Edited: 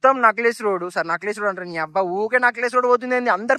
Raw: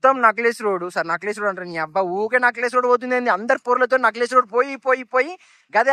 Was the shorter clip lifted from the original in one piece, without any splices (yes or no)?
yes